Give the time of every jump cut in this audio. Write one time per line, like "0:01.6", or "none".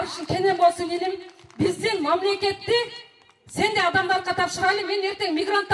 none